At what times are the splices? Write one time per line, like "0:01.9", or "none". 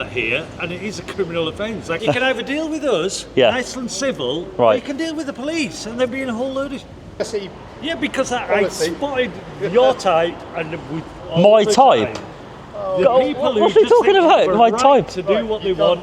0:01.9
0:07.2